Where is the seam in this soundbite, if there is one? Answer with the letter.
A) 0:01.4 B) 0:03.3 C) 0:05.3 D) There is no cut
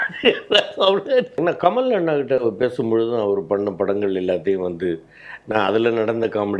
A